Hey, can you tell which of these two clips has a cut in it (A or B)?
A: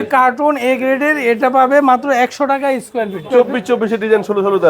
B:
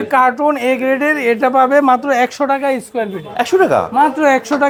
A